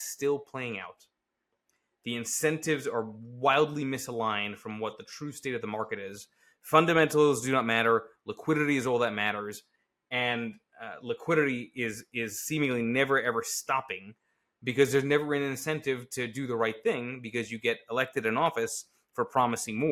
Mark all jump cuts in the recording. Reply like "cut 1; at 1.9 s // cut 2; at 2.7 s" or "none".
none